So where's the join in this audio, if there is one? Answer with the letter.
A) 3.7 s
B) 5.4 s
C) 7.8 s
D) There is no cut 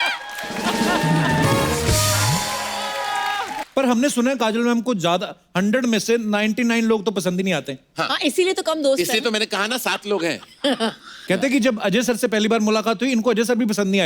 A